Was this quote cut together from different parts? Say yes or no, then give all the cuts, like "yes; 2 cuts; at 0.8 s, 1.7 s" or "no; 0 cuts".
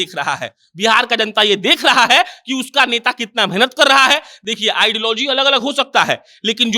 no; 0 cuts